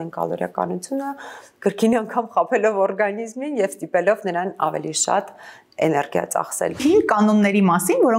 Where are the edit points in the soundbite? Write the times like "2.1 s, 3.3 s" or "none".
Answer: 6.8 s